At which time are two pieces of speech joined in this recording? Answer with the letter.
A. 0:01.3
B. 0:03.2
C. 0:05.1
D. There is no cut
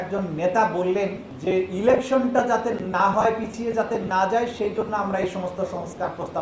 A